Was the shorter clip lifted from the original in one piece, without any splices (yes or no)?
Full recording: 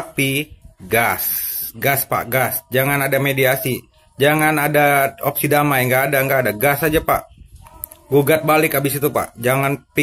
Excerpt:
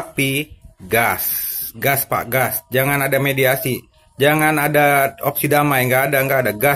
yes